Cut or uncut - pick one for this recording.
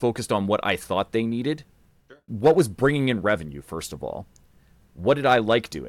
cut